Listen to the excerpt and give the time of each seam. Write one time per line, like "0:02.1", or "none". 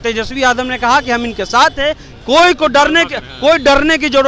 none